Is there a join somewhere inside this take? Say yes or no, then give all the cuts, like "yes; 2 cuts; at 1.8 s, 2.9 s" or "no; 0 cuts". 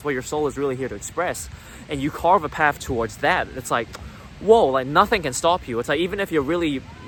no; 0 cuts